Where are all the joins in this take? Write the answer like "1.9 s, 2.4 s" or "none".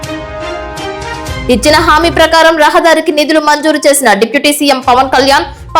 none